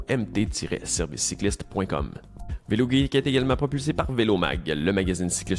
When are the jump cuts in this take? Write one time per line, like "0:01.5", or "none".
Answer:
0:02.4